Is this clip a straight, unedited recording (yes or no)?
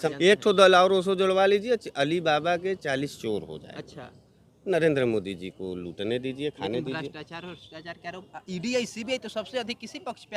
yes